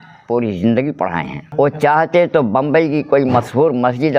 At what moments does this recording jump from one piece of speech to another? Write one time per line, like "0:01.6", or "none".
0:01.4